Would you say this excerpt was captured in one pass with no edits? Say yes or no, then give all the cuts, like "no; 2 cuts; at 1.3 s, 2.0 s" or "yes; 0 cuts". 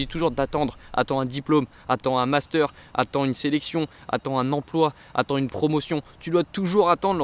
yes; 0 cuts